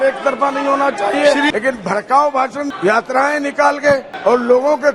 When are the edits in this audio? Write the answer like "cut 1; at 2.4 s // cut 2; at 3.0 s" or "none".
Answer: cut 1; at 1.5 s // cut 2; at 2.7 s // cut 3; at 4.1 s